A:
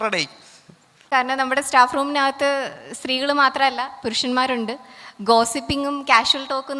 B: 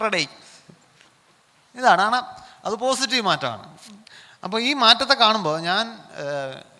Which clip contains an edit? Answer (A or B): A